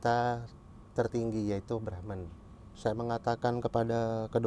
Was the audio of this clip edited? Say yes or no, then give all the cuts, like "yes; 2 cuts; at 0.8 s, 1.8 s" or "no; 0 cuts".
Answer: yes; 1 cut; at 2.7 s